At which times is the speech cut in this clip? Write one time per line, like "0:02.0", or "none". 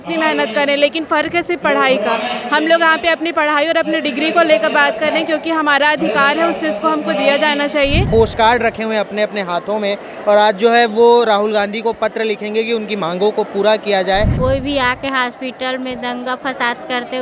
0:08.1
0:14.3